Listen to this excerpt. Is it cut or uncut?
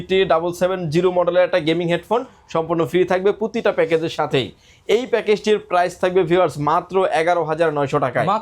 uncut